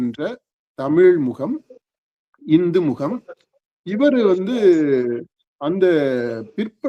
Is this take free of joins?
yes; 0 cuts

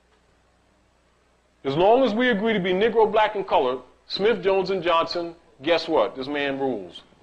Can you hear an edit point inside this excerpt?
no; 0 cuts

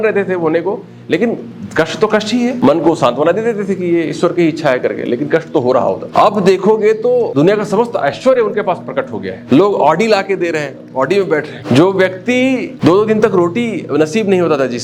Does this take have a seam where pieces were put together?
yes; 6 cuts; at 2.6 s, 6.0 s, 7.3 s, 9.3 s, 11.5 s, 12.7 s

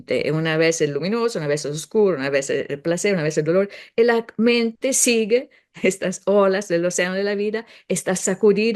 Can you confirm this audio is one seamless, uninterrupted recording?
yes; 0 cuts

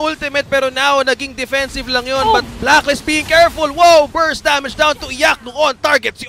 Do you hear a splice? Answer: no; 0 cuts

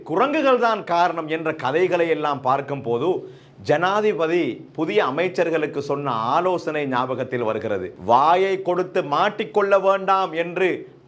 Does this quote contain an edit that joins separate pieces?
no; 0 cuts

